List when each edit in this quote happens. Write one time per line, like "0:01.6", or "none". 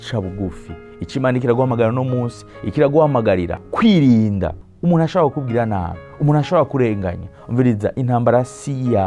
0:03.6
0:04.6

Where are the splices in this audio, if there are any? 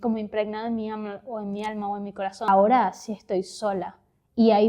0:02.5

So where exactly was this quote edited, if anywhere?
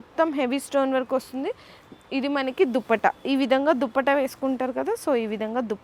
none

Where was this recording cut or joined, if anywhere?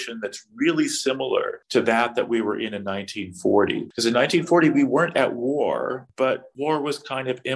0:01.6
0:03.9
0:06.3

